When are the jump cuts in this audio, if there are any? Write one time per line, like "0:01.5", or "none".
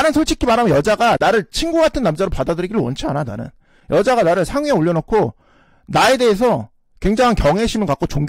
none